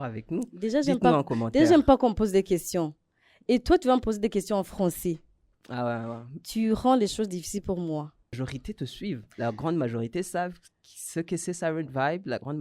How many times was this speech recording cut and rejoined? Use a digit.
1